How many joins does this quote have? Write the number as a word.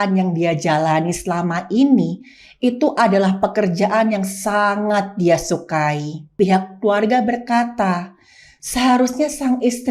one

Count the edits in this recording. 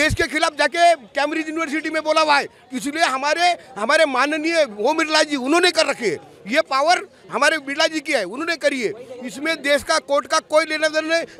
zero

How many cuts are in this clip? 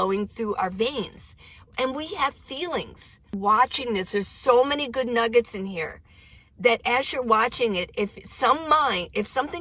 one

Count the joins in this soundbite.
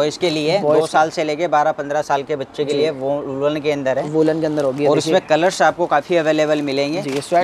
zero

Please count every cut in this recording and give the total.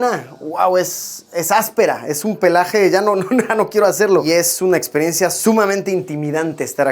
one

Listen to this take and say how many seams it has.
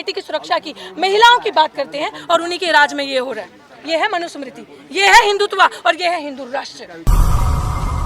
one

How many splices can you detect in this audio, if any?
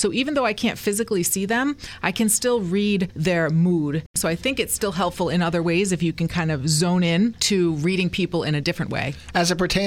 three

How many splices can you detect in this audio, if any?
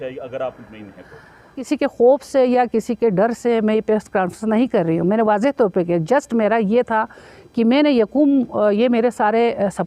one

